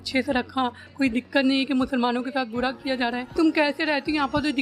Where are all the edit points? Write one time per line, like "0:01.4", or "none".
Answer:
0:03.3